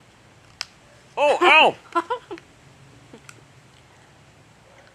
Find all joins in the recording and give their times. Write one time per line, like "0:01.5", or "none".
none